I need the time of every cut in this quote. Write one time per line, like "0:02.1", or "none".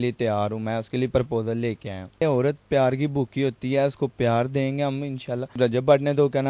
0:02.2
0:05.5